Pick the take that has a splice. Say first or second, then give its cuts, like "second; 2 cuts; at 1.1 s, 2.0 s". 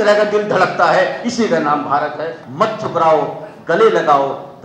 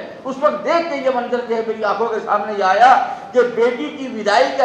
first; 1 cut; at 2.4 s